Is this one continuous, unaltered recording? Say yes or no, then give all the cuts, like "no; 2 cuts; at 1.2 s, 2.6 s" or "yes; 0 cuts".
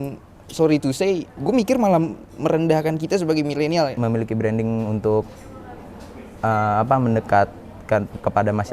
no; 2 cuts; at 1.3 s, 3.9 s